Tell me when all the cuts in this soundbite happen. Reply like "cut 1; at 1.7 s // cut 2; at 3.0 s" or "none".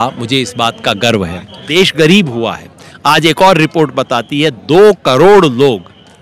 cut 1; at 1.7 s